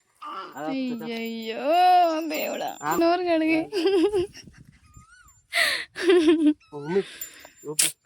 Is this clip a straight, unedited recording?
no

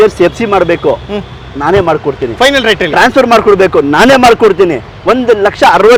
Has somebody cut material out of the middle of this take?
no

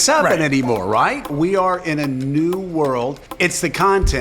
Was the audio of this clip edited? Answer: yes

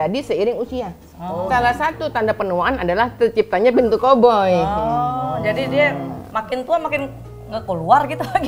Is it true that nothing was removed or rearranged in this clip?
yes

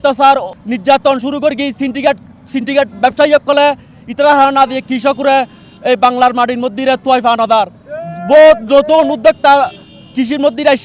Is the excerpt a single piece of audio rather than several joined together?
yes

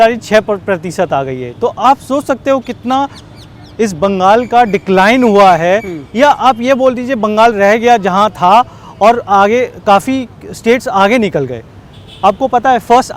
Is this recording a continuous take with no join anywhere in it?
yes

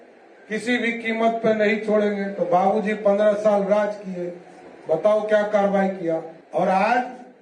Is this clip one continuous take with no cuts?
no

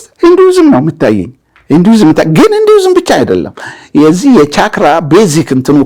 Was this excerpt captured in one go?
yes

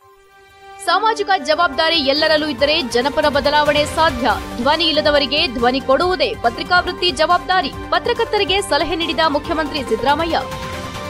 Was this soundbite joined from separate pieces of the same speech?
no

